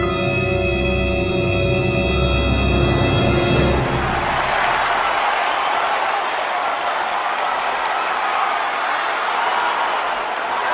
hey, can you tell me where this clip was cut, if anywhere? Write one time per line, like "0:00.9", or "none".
0:04.0